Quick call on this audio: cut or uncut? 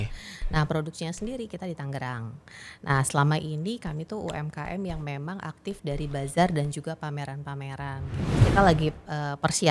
cut